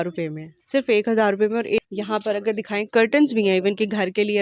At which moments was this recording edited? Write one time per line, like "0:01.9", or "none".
0:01.8